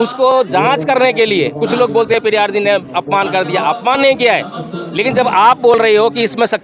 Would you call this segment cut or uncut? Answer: uncut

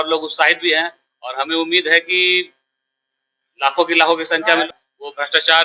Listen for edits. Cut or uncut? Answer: cut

